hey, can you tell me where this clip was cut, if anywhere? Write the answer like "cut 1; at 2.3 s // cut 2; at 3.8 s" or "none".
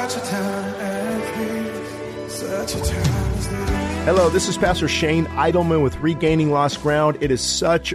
none